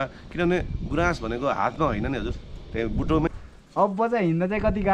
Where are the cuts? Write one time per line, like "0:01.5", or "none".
0:03.3